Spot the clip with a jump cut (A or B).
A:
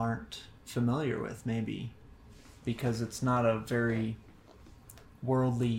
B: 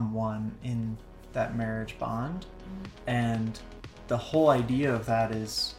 A